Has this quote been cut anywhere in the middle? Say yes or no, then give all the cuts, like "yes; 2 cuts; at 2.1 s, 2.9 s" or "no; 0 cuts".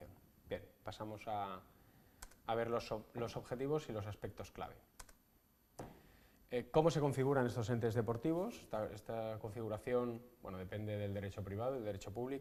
no; 0 cuts